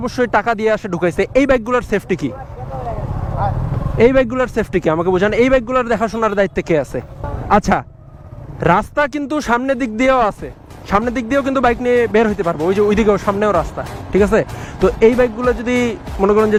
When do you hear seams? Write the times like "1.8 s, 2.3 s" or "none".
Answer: none